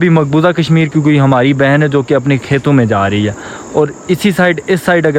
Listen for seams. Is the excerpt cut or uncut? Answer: uncut